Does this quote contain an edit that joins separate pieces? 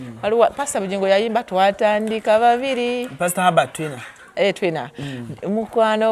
no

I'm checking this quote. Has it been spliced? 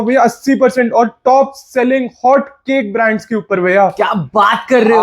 no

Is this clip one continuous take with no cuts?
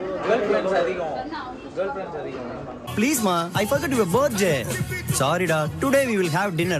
yes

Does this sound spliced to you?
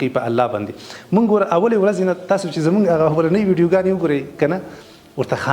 no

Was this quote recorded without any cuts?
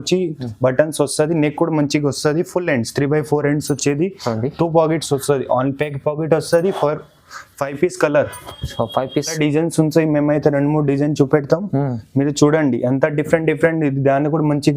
no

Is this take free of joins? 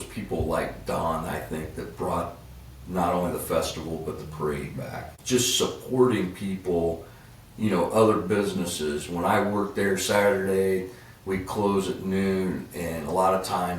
no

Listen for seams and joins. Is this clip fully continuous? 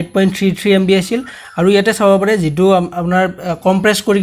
yes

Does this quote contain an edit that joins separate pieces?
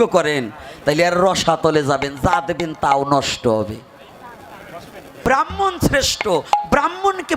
yes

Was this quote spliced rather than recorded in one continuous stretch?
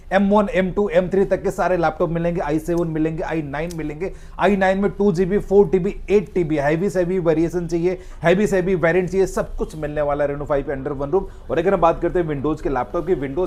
no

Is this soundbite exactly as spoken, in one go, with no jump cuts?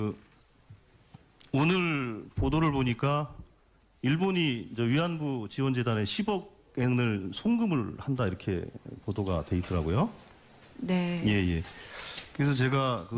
no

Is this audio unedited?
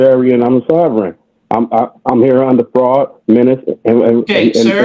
yes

